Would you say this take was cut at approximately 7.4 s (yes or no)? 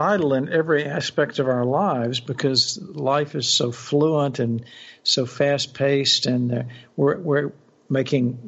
no